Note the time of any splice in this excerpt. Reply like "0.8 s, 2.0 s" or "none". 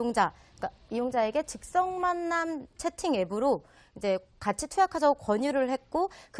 1.2 s